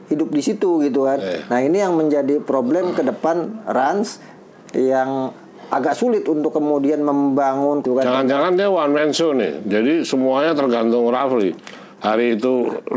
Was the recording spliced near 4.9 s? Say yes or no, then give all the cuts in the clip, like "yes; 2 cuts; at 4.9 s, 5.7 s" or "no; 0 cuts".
no; 1 cut; at 7.8 s